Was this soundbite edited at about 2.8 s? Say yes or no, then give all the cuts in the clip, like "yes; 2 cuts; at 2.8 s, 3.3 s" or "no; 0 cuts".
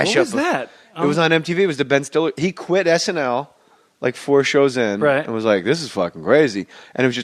yes; 1 cut; at 2.8 s